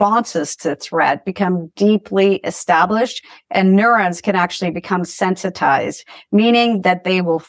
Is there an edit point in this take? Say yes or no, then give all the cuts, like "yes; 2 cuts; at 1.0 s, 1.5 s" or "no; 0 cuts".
no; 0 cuts